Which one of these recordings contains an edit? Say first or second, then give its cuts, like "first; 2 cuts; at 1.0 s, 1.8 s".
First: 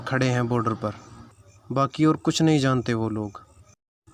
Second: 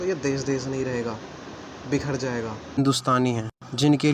second; 1 cut; at 2.8 s